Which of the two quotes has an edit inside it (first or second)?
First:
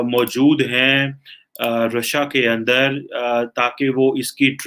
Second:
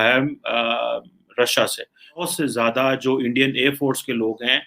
second